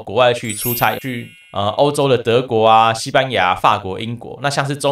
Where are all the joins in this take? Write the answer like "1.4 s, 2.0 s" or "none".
1.0 s